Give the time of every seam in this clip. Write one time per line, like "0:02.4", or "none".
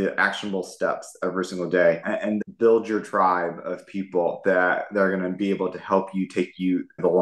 0:02.5